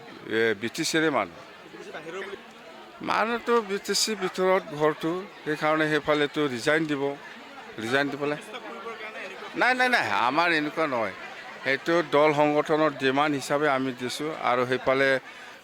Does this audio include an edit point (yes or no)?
yes